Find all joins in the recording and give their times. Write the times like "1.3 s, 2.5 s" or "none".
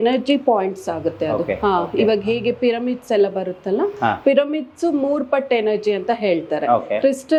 none